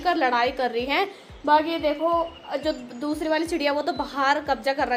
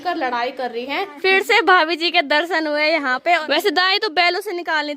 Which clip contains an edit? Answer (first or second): second